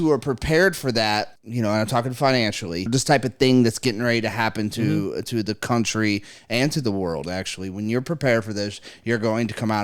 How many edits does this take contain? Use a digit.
2